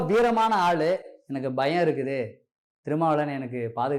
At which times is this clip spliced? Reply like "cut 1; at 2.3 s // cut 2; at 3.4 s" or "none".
none